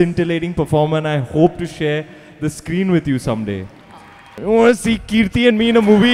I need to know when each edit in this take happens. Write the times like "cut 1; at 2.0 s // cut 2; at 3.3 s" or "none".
cut 1; at 4.4 s